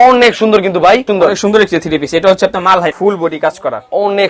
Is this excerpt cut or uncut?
cut